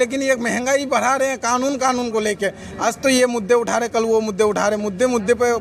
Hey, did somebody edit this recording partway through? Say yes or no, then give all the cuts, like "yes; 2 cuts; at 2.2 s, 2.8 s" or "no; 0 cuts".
no; 0 cuts